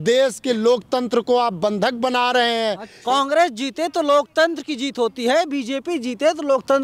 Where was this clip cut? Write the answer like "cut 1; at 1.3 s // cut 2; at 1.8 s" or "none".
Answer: cut 1; at 2.9 s

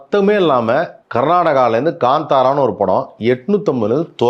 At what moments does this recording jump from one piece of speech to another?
cut 1; at 1.0 s

